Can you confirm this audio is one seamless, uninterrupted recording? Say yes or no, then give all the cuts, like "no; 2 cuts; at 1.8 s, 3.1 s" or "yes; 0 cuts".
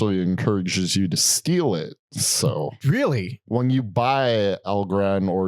no; 1 cut; at 3.3 s